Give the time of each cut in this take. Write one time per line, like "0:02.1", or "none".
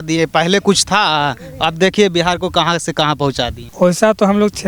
0:03.6